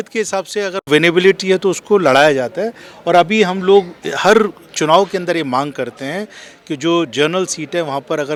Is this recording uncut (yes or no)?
yes